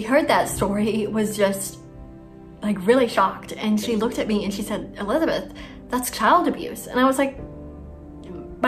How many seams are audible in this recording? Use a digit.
0